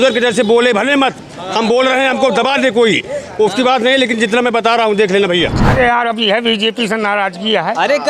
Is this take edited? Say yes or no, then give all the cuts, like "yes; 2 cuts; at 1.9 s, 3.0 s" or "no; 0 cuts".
yes; 1 cut; at 5.6 s